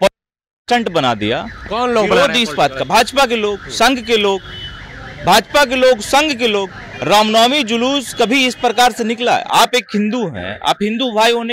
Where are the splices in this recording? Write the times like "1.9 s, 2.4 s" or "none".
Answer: none